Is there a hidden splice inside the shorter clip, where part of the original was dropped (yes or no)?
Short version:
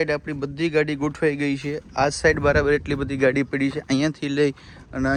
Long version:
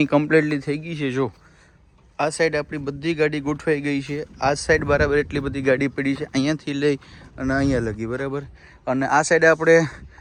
no